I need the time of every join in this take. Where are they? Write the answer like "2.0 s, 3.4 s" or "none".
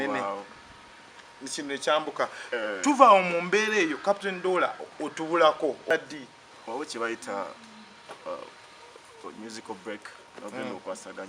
5.9 s